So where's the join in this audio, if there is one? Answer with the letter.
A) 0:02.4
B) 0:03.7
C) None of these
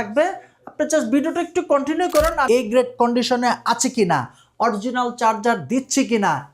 A